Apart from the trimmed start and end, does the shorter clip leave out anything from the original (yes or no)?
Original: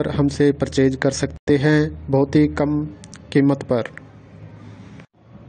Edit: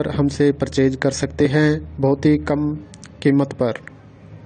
yes